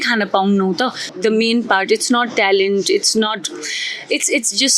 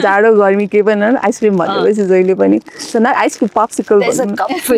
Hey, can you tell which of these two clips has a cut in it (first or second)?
first